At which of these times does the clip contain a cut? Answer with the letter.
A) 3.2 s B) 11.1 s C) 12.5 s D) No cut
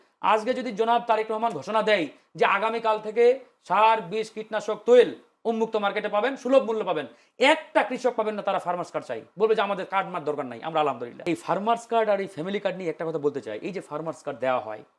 B